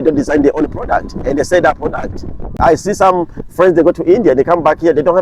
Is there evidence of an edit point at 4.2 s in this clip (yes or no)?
no